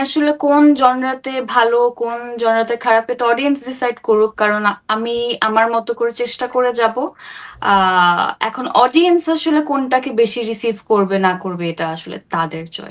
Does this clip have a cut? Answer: no; 0 cuts

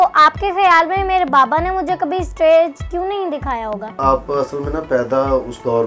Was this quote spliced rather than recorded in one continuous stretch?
yes; 1 cut; at 4.0 s

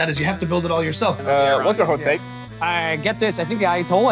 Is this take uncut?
no; 1 cut; at 1.2 s

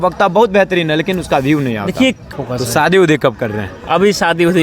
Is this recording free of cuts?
no; 1 cut; at 2.3 s

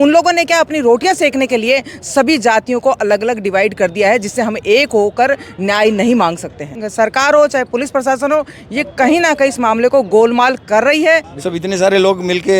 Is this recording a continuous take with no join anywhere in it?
no; 2 cuts; at 6.8 s, 11.3 s

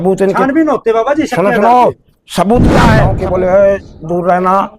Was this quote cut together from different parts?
yes; 1 cut; at 3.1 s

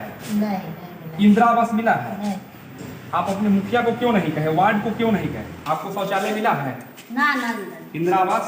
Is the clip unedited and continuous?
no; 1 cut; at 5.5 s

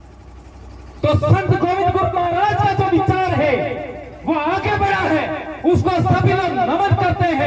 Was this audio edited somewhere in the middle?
no; 0 cuts

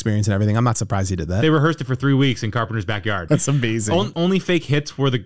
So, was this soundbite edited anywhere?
yes; 2 cuts; at 3.2 s, 4.1 s

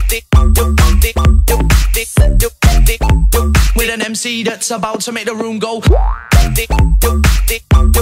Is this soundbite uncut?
no; 1 cut; at 2.1 s

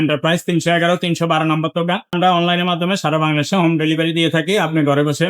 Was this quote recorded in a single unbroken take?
no; 1 cut; at 2.1 s

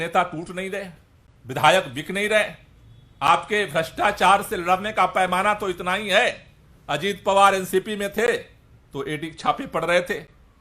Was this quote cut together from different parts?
no; 0 cuts

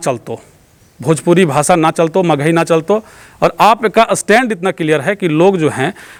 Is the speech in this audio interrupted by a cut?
no; 0 cuts

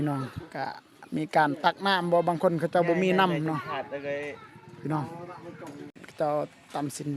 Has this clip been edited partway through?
yes; 1 cut; at 6.0 s

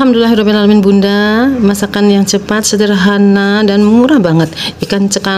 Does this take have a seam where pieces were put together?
no; 0 cuts

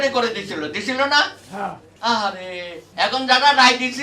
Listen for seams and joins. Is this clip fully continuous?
no; 2 cuts; at 1.9 s, 2.8 s

